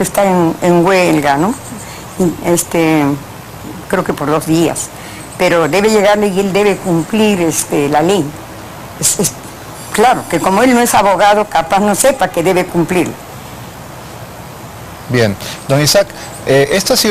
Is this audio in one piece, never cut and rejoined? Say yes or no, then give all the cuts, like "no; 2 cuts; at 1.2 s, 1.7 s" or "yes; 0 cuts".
yes; 0 cuts